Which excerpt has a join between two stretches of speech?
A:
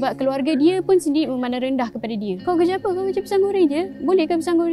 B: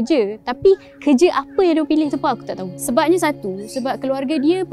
B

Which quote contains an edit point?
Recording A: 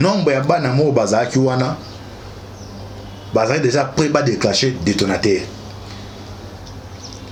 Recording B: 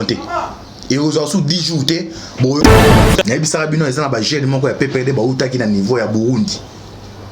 B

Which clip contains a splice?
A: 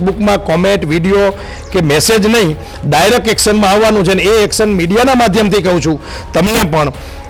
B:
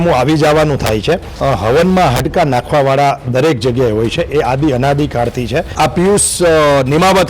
B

